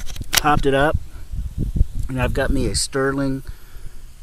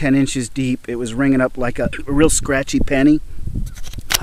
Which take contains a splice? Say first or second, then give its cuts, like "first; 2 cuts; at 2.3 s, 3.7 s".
second; 1 cut; at 2.0 s